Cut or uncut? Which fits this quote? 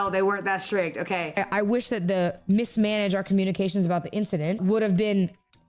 cut